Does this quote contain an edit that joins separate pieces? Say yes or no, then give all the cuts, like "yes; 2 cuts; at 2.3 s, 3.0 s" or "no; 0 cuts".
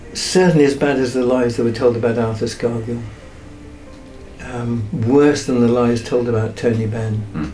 no; 0 cuts